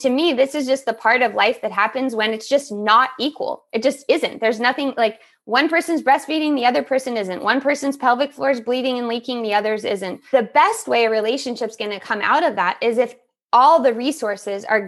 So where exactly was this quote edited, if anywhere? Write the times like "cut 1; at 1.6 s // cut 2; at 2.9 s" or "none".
cut 1; at 10.2 s